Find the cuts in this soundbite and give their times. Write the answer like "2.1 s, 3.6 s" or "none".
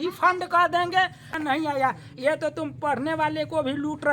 1.3 s